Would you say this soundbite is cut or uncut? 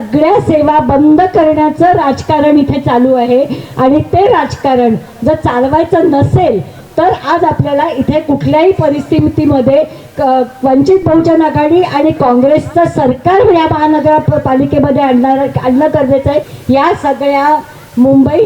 cut